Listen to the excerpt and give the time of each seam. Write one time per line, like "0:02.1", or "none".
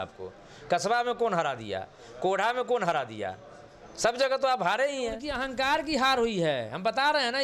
0:05.3